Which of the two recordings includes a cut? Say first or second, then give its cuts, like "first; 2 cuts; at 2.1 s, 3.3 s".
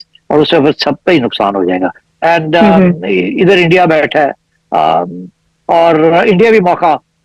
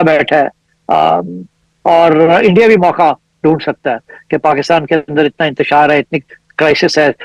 first; 1 cut; at 2.1 s